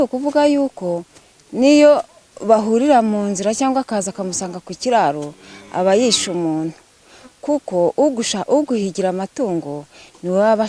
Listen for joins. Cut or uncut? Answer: uncut